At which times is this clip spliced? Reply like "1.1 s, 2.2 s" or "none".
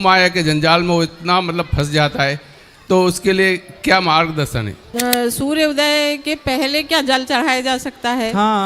4.9 s